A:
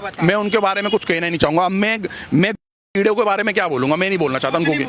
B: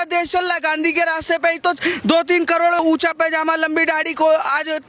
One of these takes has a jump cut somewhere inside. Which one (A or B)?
B